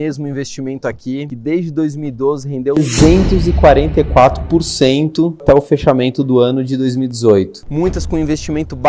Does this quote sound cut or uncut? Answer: cut